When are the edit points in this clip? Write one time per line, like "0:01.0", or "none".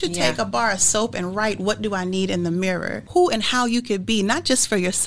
0:03.0